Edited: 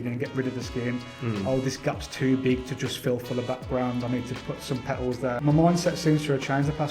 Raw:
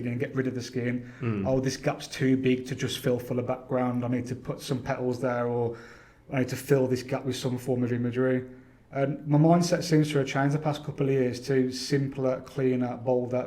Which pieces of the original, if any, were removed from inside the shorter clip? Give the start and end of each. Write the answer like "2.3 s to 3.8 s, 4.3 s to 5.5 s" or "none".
5.4 s to 9.2 s